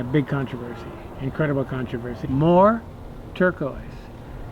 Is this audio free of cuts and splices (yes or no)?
no